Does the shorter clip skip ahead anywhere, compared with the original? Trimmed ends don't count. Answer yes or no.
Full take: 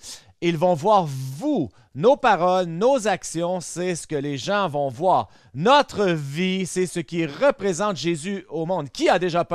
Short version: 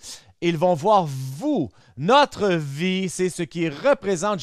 yes